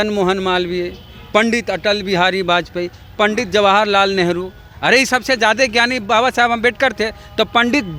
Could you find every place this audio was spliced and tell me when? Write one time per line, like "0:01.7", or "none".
none